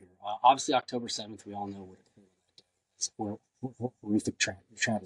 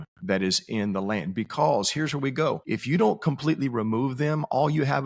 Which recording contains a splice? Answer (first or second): second